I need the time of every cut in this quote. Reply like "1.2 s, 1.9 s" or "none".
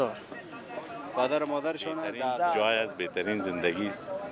2.6 s